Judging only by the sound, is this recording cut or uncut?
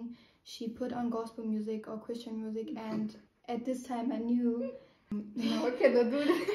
cut